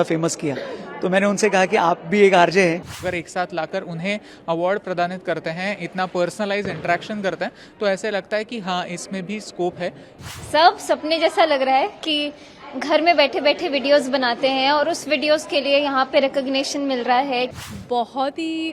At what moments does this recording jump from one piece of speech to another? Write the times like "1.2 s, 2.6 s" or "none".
2.9 s, 10.3 s, 17.6 s